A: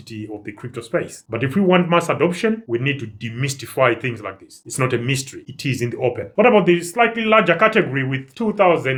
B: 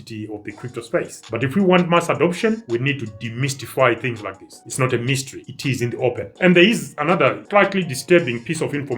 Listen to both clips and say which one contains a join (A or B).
B